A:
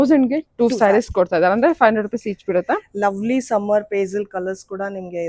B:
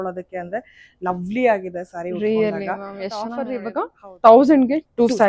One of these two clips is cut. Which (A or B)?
B